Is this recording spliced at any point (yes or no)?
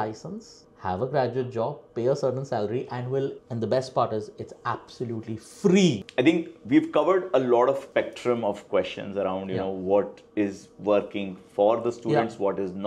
yes